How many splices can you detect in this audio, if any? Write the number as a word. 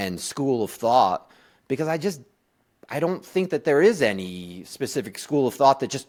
zero